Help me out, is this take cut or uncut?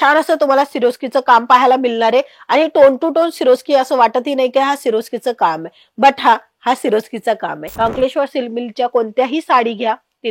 cut